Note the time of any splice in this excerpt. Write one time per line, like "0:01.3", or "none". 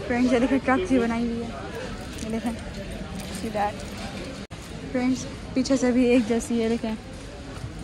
none